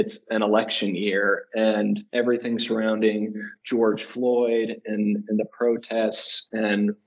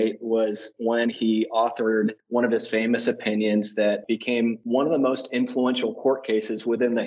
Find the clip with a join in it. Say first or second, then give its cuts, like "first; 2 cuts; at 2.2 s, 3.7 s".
second; 2 cuts; at 2.2 s, 4.1 s